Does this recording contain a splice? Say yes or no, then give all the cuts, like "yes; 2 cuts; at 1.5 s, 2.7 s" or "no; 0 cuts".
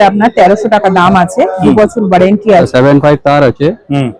yes; 1 cut; at 2.7 s